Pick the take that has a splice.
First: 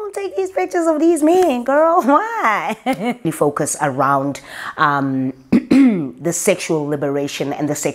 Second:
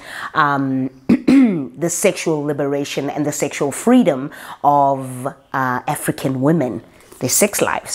first; 1 cut; at 3.2 s

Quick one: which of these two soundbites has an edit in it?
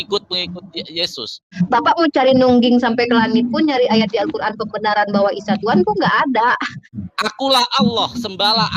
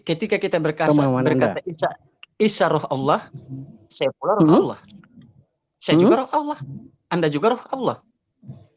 first; 2 cuts; at 1.5 s, 6.9 s

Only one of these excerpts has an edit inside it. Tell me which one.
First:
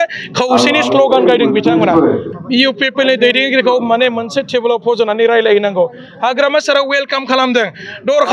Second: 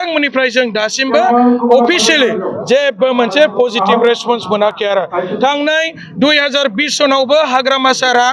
first; 1 cut; at 2.3 s

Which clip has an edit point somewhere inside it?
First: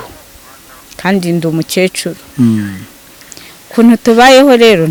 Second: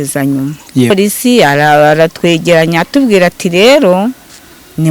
second; 1 cut; at 0.9 s

